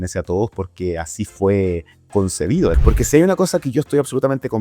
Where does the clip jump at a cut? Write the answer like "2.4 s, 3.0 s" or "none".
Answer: 2.8 s